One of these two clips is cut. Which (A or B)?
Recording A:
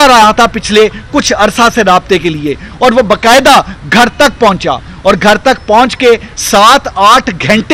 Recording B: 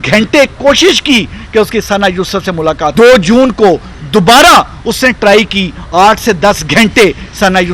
B